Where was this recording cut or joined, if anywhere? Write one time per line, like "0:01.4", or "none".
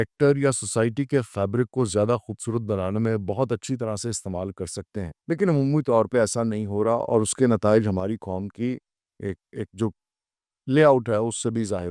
0:05.1